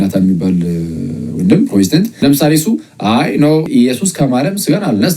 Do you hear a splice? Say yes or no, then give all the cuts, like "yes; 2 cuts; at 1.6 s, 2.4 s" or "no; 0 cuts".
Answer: yes; 2 cuts; at 2.1 s, 3.7 s